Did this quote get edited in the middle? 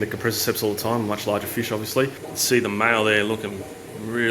yes; 1 cut; at 2.3 s

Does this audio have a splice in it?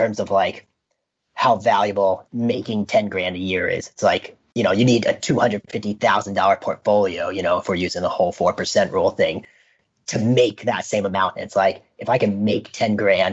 yes; 1 cut; at 2.3 s

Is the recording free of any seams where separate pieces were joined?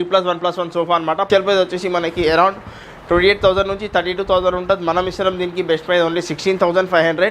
no; 1 cut; at 1.3 s

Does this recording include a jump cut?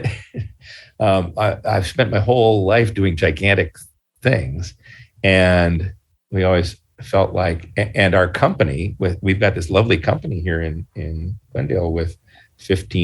no; 0 cuts

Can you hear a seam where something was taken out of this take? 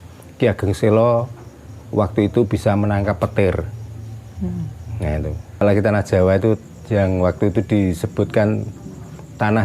yes; 1 cut; at 5.6 s

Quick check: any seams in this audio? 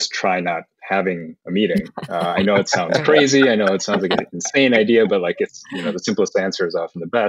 no; 0 cuts

